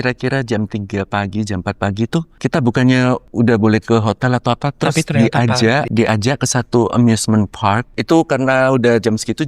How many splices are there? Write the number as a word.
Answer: four